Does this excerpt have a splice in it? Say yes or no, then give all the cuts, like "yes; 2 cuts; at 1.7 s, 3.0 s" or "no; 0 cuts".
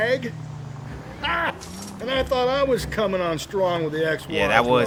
no; 0 cuts